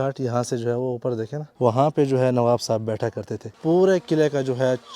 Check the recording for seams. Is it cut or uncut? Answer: cut